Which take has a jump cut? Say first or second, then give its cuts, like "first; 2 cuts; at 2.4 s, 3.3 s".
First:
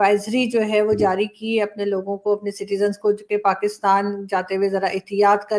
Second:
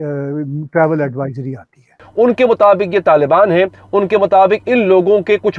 second; 1 cut; at 2.0 s